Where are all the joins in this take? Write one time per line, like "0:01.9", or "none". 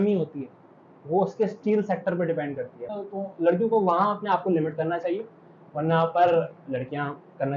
0:02.9